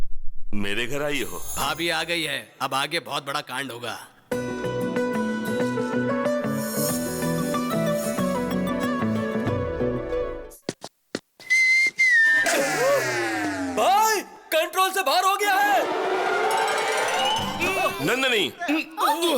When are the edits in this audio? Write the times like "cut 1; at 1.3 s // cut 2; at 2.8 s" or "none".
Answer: cut 1; at 1.4 s // cut 2; at 17.5 s